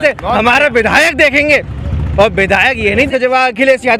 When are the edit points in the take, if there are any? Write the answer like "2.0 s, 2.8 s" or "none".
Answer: 3.1 s